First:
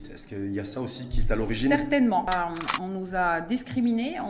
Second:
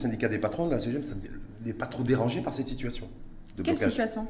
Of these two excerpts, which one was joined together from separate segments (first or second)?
first